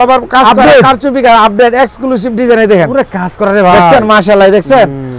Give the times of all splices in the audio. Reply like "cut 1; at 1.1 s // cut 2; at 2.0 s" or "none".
none